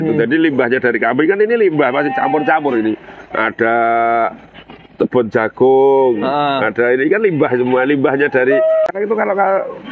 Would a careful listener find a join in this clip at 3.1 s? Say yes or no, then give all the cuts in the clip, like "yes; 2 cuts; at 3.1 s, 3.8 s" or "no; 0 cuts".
no; 1 cut; at 8.9 s